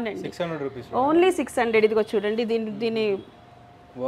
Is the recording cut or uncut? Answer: uncut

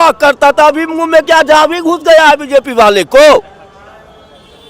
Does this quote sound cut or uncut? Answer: uncut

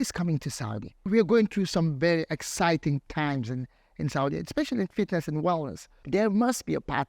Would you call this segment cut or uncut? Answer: cut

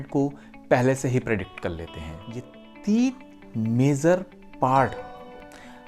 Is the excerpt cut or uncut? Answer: cut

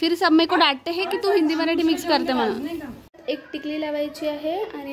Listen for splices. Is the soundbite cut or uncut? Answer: cut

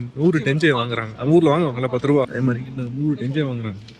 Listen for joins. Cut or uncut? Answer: cut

